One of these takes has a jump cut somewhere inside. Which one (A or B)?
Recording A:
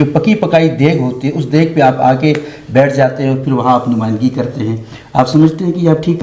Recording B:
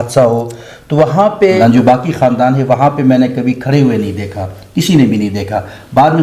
B